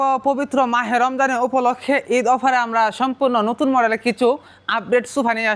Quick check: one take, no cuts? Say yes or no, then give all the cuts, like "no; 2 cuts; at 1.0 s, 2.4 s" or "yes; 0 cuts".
yes; 0 cuts